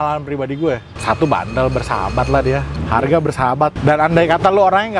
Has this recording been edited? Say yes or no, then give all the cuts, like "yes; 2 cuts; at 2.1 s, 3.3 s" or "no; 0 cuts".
yes; 3 cuts; at 0.9 s, 2.7 s, 3.8 s